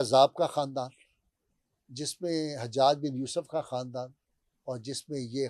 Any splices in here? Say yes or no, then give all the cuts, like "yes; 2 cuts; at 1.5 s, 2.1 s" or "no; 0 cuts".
no; 0 cuts